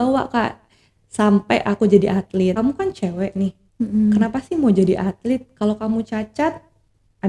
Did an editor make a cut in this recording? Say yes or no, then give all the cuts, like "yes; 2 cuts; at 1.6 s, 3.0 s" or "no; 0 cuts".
yes; 1 cut; at 2.6 s